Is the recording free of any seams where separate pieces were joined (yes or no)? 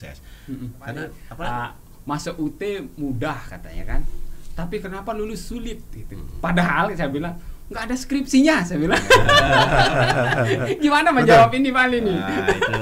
no